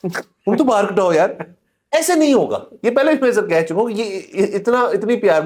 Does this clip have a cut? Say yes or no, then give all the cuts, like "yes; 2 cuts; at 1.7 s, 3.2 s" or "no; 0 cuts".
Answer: no; 0 cuts